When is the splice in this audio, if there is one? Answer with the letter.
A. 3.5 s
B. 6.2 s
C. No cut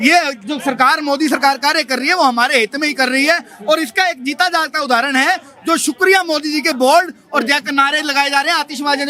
C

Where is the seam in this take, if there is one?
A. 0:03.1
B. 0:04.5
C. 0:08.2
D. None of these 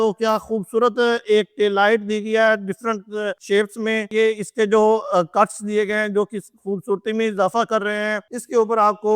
C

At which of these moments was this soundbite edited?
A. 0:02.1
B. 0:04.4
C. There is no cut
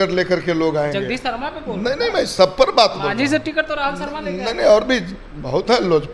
C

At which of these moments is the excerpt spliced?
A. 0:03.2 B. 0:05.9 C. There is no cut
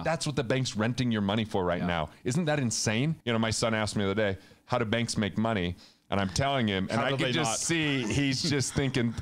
A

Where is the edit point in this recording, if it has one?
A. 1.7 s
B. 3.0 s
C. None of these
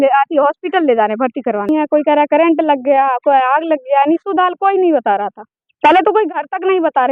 A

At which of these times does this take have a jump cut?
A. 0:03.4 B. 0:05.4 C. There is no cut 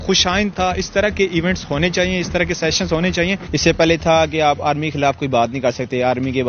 A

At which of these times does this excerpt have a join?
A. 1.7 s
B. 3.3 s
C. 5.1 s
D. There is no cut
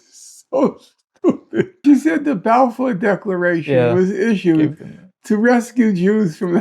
A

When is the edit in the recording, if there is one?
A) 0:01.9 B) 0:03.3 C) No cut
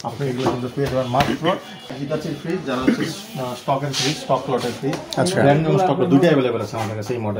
A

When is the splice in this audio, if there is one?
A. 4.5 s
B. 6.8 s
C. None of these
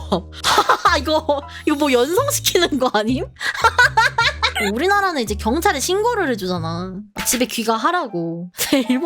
A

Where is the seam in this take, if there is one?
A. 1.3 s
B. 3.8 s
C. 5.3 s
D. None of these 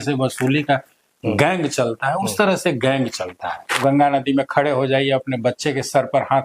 B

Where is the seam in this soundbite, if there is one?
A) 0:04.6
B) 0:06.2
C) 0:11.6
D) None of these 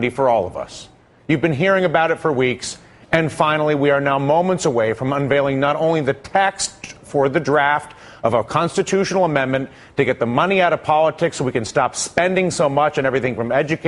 A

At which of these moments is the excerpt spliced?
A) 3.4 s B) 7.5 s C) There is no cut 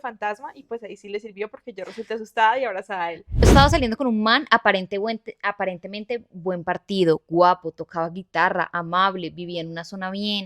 A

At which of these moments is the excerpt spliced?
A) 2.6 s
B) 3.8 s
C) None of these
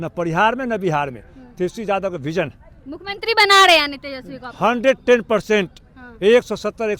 C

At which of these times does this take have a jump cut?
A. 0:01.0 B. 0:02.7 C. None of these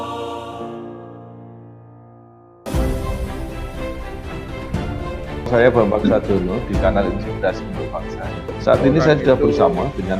B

